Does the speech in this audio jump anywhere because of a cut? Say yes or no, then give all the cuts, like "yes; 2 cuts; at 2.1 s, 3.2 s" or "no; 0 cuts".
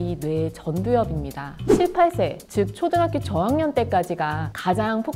yes; 1 cut; at 1.6 s